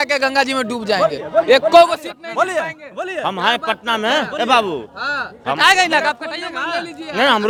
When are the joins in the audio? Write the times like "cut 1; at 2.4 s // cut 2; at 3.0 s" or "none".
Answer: none

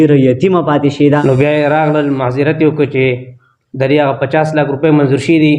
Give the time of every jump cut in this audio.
cut 1; at 1.2 s

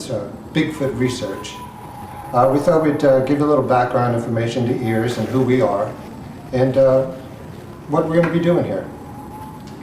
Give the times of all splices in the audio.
cut 1; at 1.9 s

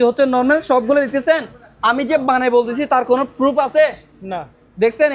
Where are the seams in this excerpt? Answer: none

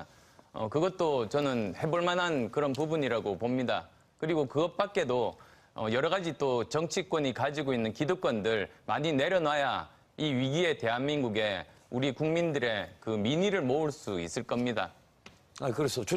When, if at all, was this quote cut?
cut 1; at 6.3 s

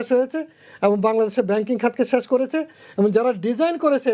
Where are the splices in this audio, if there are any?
none

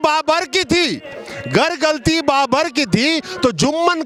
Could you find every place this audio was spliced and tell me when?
none

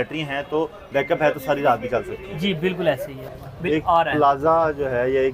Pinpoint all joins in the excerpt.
cut 1; at 3.3 s

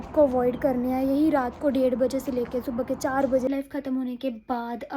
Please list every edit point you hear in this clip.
cut 1; at 3.5 s

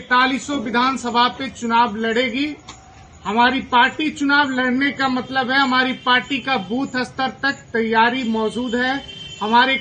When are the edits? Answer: none

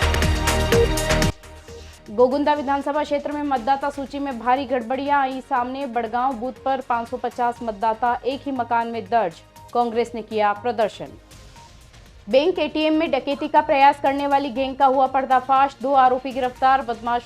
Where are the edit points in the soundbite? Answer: cut 1; at 1.3 s

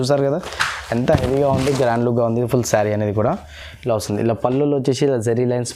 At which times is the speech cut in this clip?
none

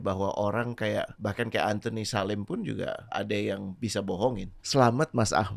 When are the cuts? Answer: cut 1; at 1.1 s // cut 2; at 3.1 s // cut 3; at 4.5 s

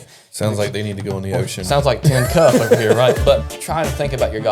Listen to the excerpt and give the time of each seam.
cut 1; at 3.5 s

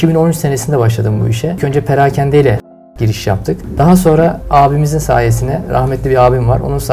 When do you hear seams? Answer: cut 1; at 1.6 s // cut 2; at 3.3 s // cut 3; at 4.4 s

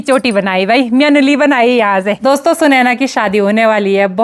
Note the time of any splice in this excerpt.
cut 1; at 2.2 s

